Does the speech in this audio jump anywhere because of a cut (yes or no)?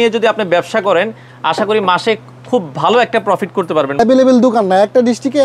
yes